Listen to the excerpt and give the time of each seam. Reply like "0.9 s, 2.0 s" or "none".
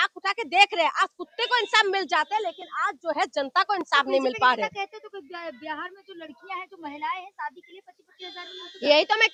none